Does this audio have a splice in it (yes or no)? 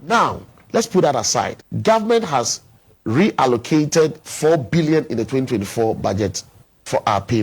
yes